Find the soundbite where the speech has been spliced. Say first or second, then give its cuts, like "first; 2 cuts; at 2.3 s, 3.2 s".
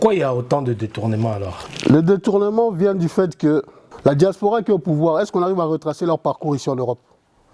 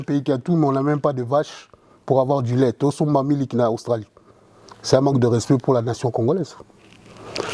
first; 2 cuts; at 1.6 s, 3.8 s